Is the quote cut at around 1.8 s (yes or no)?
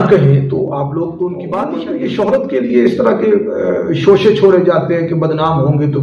yes